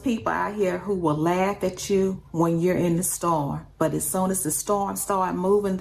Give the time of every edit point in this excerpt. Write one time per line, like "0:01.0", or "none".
none